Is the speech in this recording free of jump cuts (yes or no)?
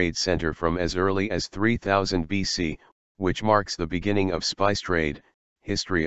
yes